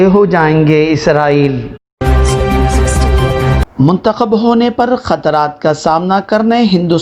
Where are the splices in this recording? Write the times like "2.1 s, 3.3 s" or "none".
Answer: 1.9 s, 3.7 s